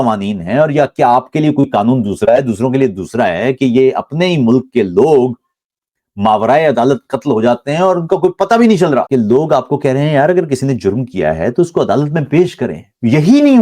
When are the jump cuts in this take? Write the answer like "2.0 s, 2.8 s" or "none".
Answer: 9.1 s